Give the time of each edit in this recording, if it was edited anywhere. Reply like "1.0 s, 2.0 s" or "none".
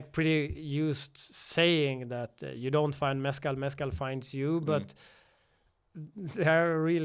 none